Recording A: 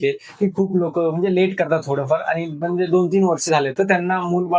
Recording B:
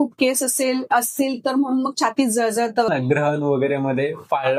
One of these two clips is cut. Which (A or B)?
B